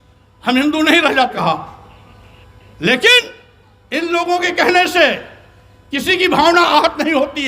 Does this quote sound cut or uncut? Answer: cut